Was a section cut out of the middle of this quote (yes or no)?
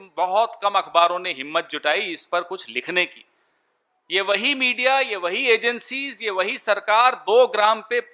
no